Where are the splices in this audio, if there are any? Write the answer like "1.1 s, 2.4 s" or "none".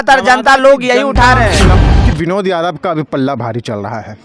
1.7 s

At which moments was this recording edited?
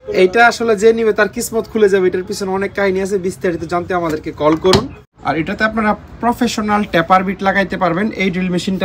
5.0 s

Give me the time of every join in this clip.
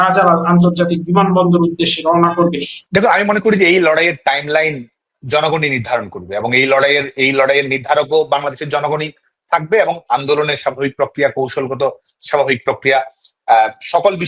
2.7 s

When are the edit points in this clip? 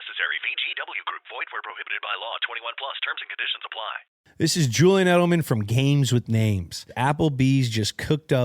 4.1 s, 6.9 s

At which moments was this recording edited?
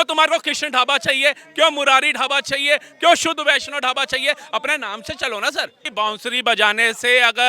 5.8 s

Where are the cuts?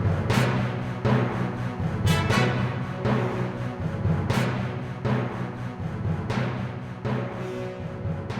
none

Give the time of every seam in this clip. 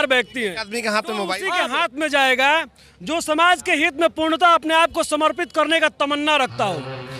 1.4 s

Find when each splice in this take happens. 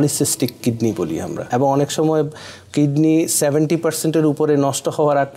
1.4 s

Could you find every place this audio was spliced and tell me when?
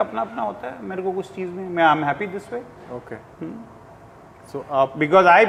none

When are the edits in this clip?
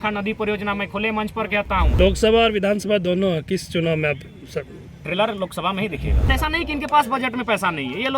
2.0 s, 6.3 s

